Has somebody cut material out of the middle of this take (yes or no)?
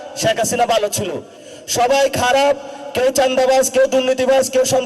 yes